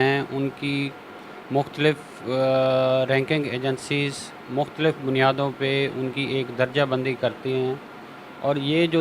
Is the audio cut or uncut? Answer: uncut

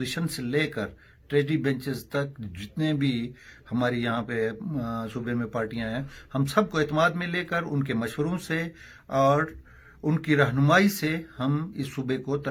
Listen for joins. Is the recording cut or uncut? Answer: uncut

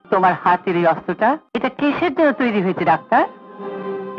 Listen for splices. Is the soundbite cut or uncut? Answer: cut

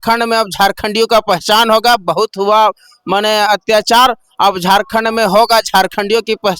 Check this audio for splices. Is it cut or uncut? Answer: uncut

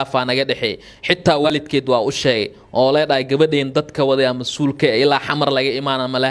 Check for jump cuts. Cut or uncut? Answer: cut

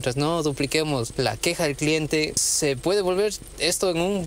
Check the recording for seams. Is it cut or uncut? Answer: cut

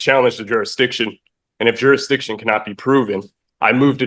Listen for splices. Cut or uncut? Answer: uncut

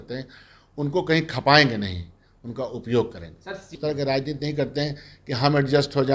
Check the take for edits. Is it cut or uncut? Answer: cut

